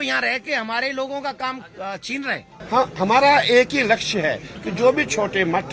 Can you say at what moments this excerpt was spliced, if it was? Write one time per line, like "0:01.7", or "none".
0:02.5